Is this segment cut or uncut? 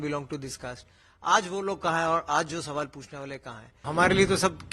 cut